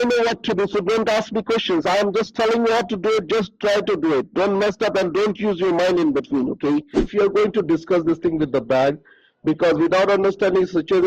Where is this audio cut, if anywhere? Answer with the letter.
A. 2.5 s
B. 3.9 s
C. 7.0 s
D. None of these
C